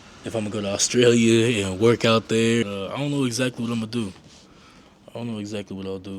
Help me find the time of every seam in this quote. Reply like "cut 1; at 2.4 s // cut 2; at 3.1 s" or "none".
cut 1; at 2.6 s

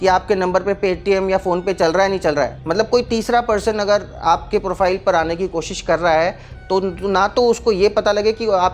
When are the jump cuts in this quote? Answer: cut 1; at 2.6 s

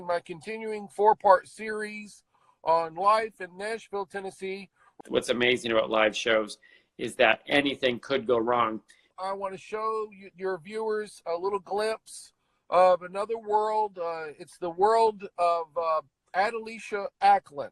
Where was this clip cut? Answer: cut 1; at 4.8 s // cut 2; at 9.1 s // cut 3; at 16.2 s

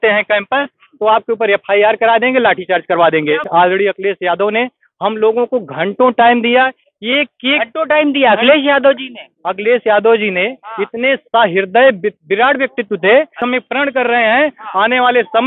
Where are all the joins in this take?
cut 1; at 3.4 s // cut 2; at 13.4 s

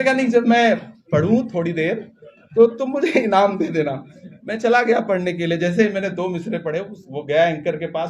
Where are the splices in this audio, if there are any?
none

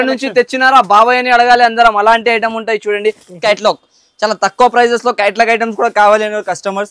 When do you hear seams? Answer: cut 1; at 3.4 s

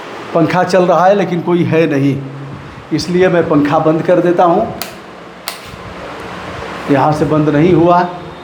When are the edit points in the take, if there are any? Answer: none

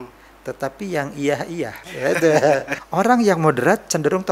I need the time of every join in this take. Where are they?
cut 1; at 2.8 s

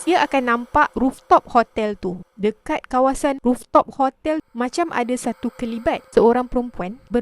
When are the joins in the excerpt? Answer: cut 1; at 0.9 s // cut 2; at 2.2 s

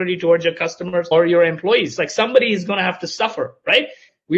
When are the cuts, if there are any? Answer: cut 1; at 1.1 s

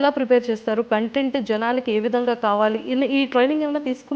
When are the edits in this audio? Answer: none

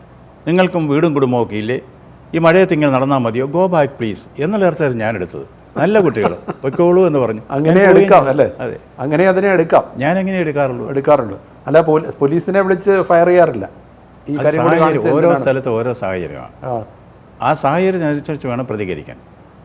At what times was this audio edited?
none

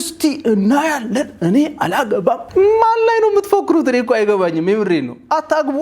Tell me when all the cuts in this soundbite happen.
none

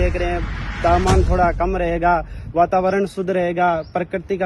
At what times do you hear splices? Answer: none

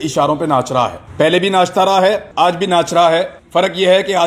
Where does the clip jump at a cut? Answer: cut 1; at 1.0 s // cut 2; at 2.3 s // cut 3; at 3.4 s

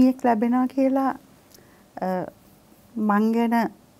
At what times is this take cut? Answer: none

